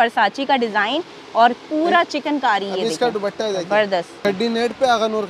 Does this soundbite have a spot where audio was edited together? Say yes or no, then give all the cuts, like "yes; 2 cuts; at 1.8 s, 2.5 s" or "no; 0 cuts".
yes; 1 cut; at 4.2 s